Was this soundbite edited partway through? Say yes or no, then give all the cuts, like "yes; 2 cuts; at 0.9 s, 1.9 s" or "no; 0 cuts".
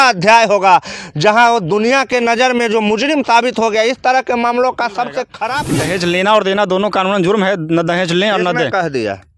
yes; 1 cut; at 5.4 s